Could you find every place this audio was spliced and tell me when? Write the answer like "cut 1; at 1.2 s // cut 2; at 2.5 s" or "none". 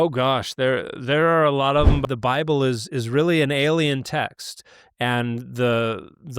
cut 1; at 2.0 s